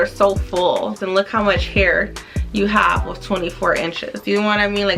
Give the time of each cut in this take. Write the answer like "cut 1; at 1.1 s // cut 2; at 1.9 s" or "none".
cut 1; at 1.0 s